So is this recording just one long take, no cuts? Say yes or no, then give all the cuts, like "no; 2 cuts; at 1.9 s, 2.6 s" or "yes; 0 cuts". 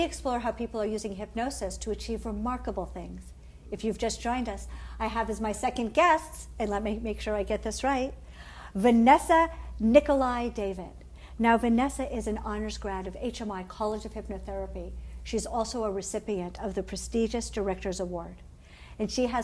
no; 1 cut; at 1.2 s